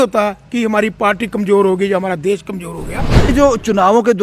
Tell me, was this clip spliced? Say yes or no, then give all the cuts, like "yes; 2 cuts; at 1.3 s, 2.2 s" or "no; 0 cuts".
yes; 1 cut; at 3.3 s